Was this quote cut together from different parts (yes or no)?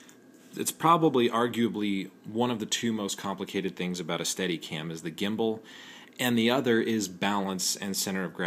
yes